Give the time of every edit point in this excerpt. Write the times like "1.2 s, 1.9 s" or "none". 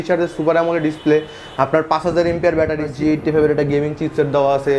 2.8 s